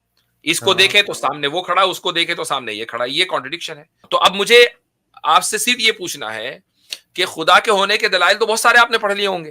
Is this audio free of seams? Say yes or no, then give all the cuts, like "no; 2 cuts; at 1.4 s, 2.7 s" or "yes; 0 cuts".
no; 1 cut; at 4.0 s